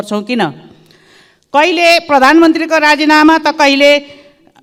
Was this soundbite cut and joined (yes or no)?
no